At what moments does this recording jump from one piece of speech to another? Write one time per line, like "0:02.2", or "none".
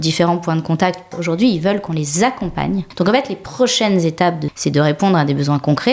0:01.2
0:02.9
0:04.5